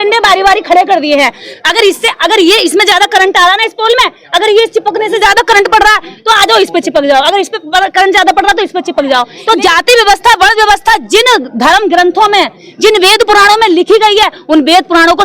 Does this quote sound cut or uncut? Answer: cut